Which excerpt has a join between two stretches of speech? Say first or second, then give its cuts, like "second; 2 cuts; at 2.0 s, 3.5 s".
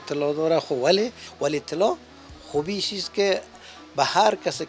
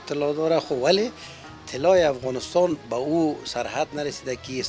first; 1 cut; at 1.2 s